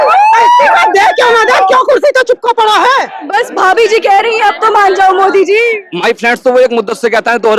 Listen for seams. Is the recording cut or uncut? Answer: cut